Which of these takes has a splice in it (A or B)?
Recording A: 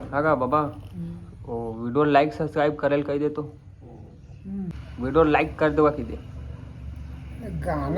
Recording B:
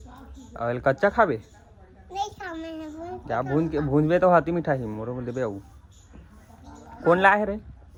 A